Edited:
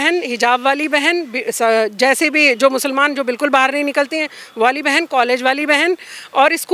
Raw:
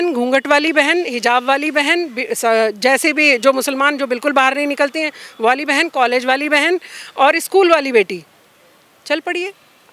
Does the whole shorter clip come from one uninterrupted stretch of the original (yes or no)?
yes